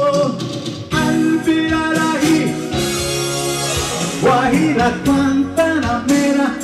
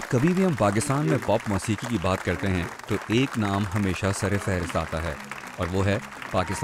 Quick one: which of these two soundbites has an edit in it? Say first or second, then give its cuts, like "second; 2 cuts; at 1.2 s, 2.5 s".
second; 1 cut; at 4.1 s